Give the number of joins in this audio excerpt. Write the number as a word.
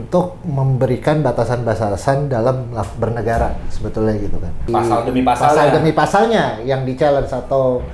one